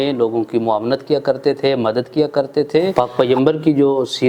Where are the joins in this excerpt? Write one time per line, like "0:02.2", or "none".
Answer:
0:02.9